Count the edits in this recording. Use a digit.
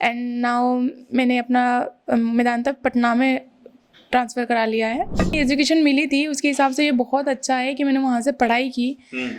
1